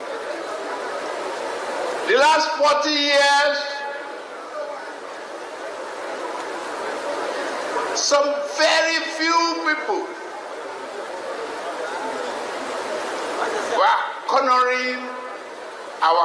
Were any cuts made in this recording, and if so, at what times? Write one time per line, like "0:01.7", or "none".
none